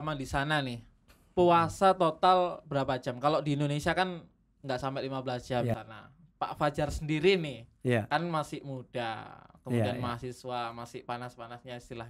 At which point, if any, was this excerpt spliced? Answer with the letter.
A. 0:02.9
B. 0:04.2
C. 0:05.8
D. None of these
C